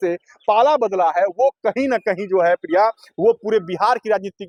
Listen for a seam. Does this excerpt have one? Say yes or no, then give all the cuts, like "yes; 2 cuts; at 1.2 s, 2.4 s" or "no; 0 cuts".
no; 0 cuts